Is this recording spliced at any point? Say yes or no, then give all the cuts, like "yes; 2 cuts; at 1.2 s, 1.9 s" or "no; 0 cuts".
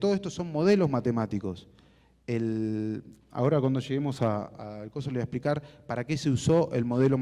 no; 0 cuts